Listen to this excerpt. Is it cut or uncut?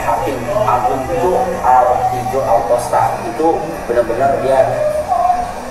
uncut